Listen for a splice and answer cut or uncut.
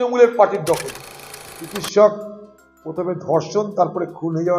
cut